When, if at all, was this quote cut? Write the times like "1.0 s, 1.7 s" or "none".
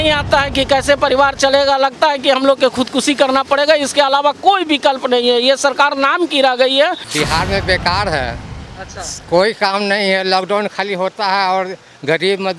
7.0 s